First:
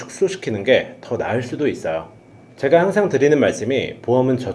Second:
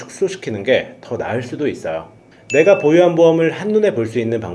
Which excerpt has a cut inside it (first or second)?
second